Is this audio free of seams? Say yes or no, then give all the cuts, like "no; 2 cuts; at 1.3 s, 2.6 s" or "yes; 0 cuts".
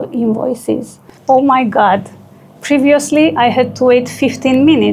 no; 1 cut; at 1.1 s